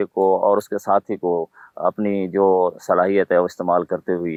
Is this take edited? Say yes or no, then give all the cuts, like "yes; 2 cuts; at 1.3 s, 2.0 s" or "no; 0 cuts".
no; 0 cuts